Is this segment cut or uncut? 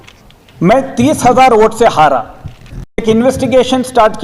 cut